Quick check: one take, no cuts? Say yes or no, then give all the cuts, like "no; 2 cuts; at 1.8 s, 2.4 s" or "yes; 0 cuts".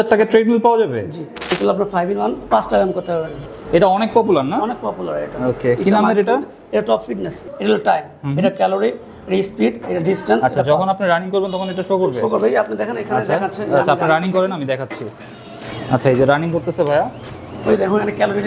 no; 3 cuts; at 1.6 s, 3.5 s, 7.4 s